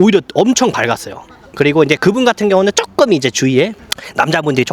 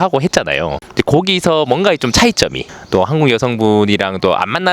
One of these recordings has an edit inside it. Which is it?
second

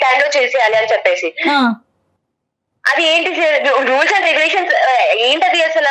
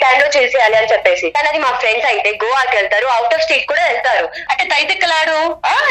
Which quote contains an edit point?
second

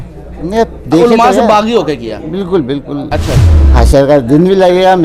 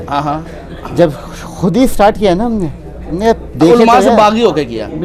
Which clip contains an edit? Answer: first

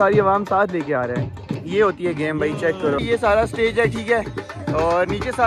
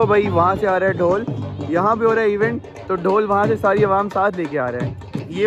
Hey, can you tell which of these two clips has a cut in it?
first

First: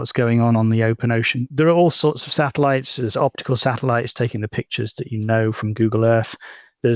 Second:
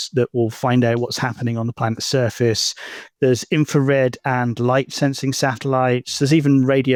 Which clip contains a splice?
first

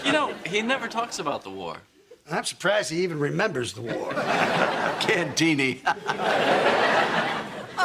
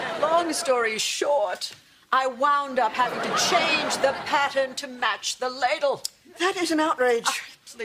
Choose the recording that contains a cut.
first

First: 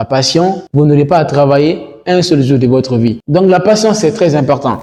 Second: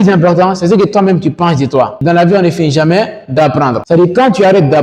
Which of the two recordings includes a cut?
second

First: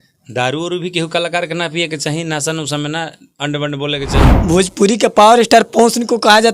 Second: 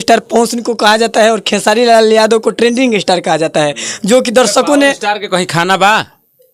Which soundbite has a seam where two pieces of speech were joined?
first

